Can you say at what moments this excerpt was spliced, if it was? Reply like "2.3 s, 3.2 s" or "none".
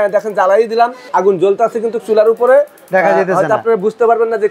1.0 s